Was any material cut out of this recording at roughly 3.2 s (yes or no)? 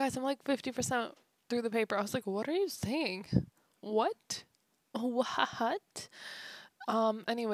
no